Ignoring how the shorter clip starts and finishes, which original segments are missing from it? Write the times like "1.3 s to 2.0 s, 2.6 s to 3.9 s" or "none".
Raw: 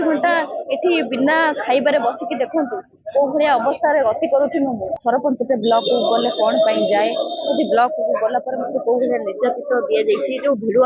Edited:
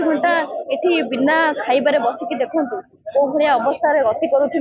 none